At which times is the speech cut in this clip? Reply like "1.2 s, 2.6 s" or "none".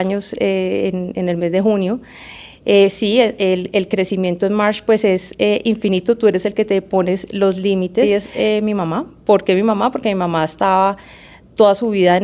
8.1 s